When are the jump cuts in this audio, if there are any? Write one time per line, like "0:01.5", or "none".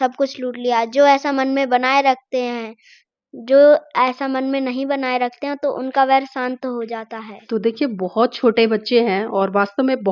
none